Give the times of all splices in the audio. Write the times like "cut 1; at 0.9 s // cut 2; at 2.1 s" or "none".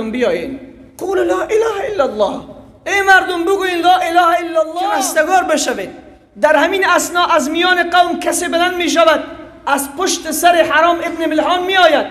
cut 1; at 4.8 s